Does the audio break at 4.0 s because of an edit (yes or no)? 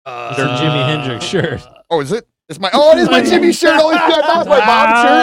no